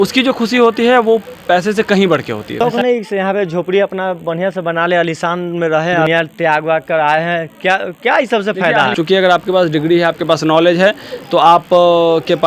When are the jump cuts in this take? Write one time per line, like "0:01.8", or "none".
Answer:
0:02.6
0:06.1
0:08.9